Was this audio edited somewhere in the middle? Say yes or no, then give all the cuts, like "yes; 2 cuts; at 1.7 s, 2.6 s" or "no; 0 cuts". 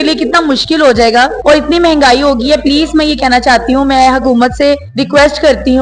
yes; 2 cuts; at 1.4 s, 4.9 s